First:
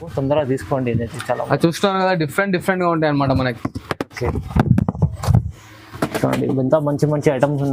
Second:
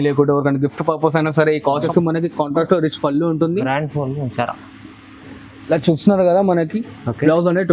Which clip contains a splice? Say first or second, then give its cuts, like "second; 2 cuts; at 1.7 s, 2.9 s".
second; 1 cut; at 1.8 s